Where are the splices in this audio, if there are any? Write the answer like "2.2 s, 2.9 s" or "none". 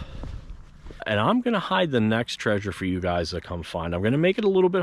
1.0 s

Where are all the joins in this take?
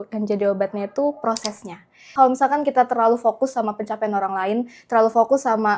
2.0 s

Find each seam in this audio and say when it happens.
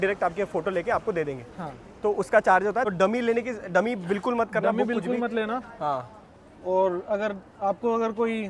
2.9 s

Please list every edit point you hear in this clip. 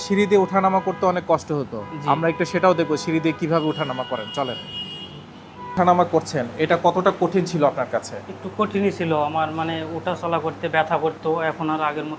none

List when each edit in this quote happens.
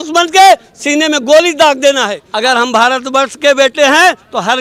2.2 s

